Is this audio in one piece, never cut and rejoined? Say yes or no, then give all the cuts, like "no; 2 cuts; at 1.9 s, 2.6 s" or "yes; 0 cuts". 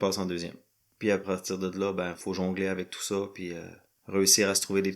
no; 1 cut; at 2.2 s